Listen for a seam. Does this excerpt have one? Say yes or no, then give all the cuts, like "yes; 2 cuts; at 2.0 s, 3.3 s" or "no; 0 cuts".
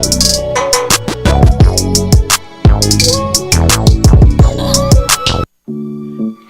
yes; 1 cut; at 5.4 s